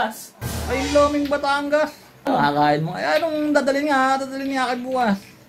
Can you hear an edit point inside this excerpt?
yes; 1 cut; at 2.2 s

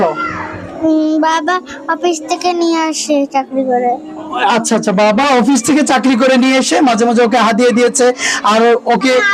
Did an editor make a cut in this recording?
no; 0 cuts

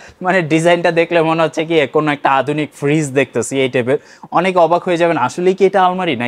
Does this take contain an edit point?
no; 0 cuts

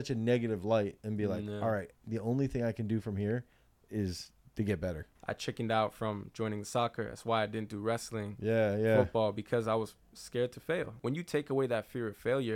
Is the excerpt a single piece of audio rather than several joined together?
no; 2 cuts; at 5.1 s, 11.0 s

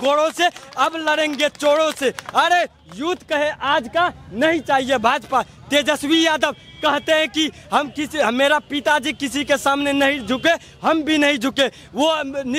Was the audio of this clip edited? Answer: no; 0 cuts

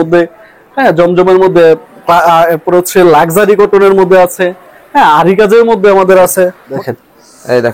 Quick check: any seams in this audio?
yes; 1 cut; at 6.7 s

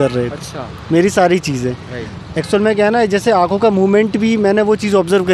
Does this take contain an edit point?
no; 0 cuts

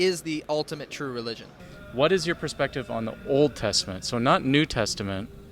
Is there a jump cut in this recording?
yes; 1 cut; at 1.8 s

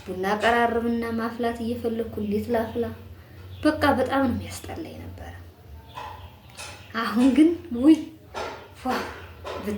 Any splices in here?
no; 0 cuts

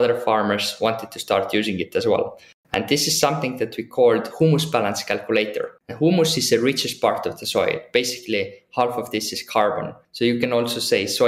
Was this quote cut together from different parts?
yes; 1 cut; at 2.6 s

